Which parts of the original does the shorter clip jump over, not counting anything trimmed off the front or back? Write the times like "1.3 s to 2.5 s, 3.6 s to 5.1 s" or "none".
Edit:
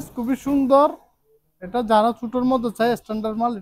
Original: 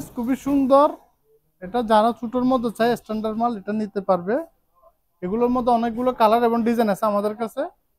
none